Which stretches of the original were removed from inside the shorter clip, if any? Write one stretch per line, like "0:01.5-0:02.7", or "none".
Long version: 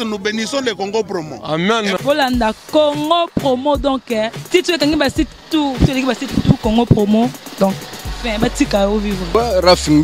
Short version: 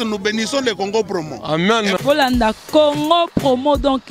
none